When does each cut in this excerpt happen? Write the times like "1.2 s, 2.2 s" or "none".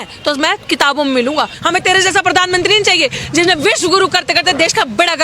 1.6 s

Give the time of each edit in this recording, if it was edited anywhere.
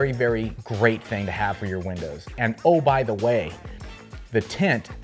none

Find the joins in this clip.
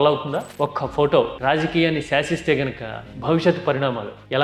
none

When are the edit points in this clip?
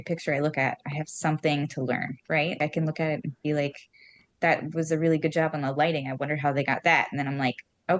none

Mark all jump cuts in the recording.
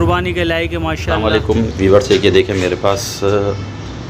1.2 s

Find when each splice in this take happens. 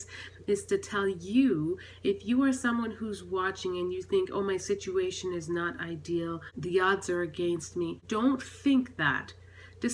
6.5 s, 8.0 s

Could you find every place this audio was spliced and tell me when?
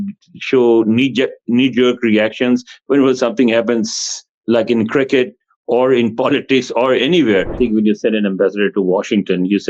7.5 s

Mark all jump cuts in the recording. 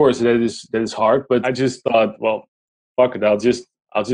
1.4 s

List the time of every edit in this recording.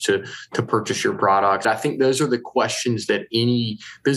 1.6 s

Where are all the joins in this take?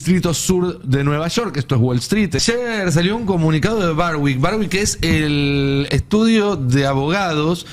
2.4 s

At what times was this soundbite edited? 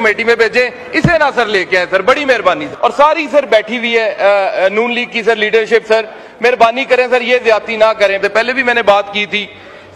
2.7 s, 8.2 s

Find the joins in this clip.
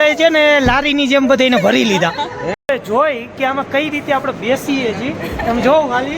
2.6 s

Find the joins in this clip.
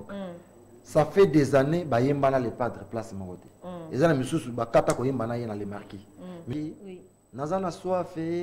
6.5 s

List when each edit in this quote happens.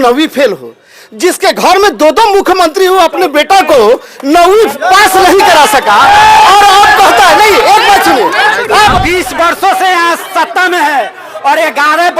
9.0 s

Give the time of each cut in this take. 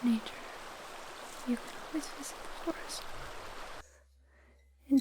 3.8 s

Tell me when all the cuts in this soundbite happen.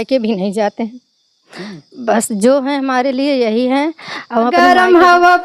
4.5 s

